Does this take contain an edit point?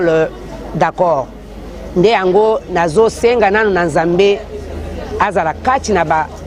no; 0 cuts

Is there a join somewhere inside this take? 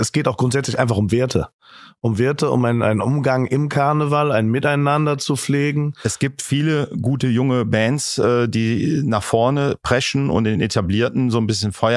yes; 1 cut; at 6.0 s

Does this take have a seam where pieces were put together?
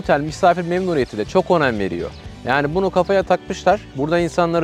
no; 0 cuts

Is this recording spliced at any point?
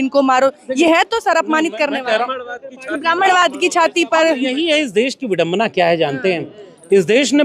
no; 0 cuts

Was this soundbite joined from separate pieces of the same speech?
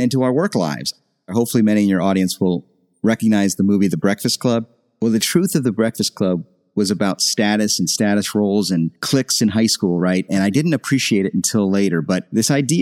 yes; 2 cuts; at 1.3 s, 4.7 s

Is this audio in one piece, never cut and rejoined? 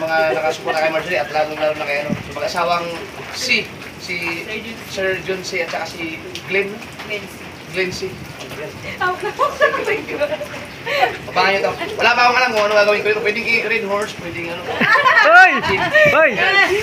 yes; 0 cuts

